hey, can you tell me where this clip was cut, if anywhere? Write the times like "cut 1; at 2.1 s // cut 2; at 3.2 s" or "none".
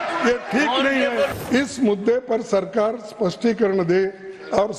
cut 1; at 1.4 s

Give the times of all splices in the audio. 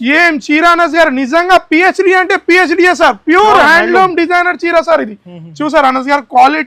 none

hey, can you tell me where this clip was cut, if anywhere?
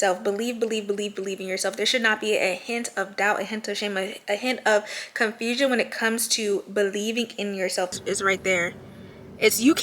cut 1; at 8.0 s

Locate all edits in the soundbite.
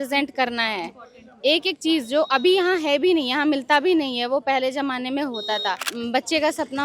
cut 1; at 5.9 s

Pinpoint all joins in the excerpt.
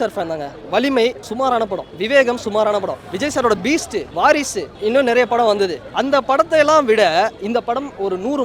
cut 1; at 1.5 s // cut 2; at 3.0 s // cut 3; at 4.1 s // cut 4; at 4.7 s // cut 5; at 5.9 s

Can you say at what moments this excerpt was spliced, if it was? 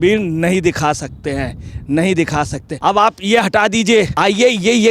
cut 1; at 2.6 s // cut 2; at 4.1 s

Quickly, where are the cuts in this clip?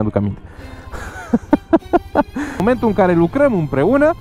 cut 1; at 2.6 s

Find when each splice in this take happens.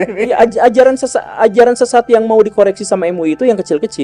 none

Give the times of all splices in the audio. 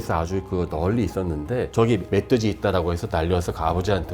cut 1; at 1.7 s

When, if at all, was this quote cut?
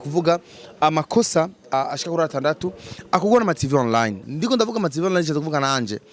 cut 1; at 1.7 s // cut 2; at 4.3 s

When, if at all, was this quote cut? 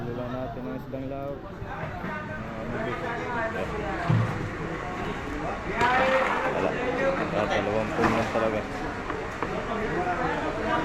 none

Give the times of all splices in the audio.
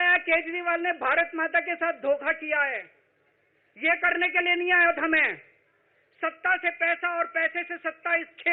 none

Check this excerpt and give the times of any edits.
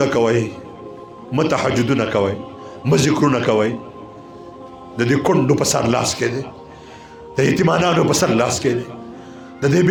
none

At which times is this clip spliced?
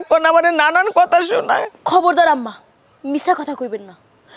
cut 1; at 1.8 s

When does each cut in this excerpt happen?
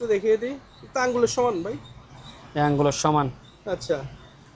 none

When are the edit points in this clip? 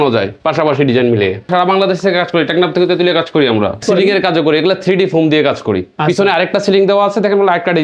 cut 1; at 1.5 s // cut 2; at 3.8 s

